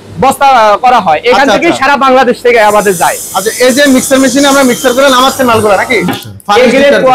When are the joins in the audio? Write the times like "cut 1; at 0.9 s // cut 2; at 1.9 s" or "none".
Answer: cut 1; at 6.1 s